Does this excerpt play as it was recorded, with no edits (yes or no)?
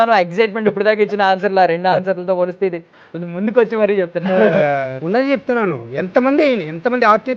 no